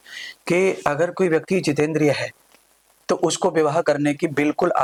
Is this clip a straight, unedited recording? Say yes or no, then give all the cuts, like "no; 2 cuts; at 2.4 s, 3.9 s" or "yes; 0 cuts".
yes; 0 cuts